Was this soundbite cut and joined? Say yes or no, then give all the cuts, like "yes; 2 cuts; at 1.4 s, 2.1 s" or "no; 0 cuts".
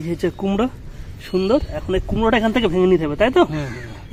no; 0 cuts